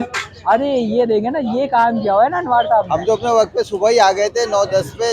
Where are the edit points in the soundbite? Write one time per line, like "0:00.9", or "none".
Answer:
0:02.9